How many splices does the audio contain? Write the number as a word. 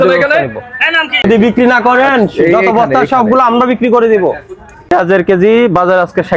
two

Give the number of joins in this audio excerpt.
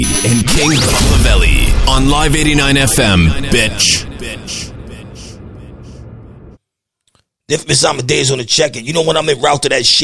one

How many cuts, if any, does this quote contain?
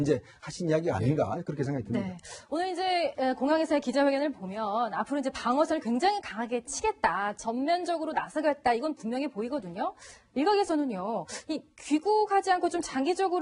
one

